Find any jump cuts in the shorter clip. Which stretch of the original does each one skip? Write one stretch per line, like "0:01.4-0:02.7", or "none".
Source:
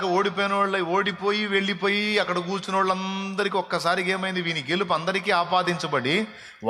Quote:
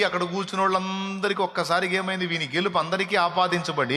none